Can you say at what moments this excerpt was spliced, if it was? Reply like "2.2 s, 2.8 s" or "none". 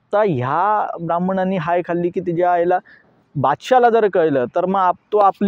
none